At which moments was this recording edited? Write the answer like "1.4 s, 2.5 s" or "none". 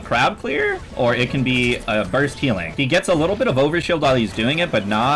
2.7 s